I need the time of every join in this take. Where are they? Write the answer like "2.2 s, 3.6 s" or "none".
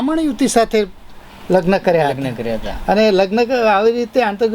none